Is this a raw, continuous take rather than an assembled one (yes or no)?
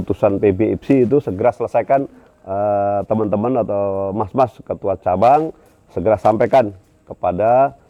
yes